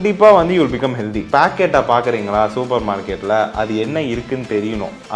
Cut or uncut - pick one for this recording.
cut